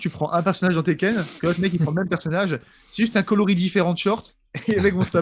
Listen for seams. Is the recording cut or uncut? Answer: uncut